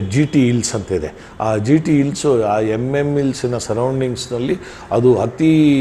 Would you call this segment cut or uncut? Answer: uncut